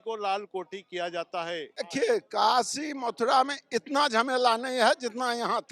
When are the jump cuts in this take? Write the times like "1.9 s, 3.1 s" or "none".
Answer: 1.8 s